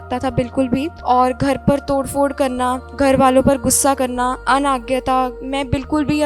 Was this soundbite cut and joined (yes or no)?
yes